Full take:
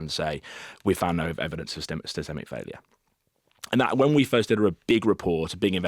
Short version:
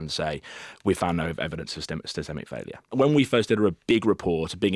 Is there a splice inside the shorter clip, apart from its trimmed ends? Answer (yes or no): yes